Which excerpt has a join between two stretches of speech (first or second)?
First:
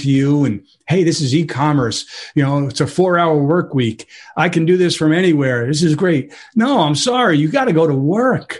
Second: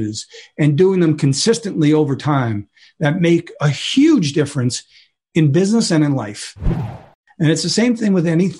second